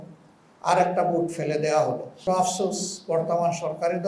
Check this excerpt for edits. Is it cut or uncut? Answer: cut